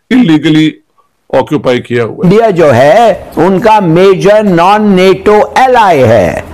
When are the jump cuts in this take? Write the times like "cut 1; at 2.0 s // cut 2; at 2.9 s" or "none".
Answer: cut 1; at 2.2 s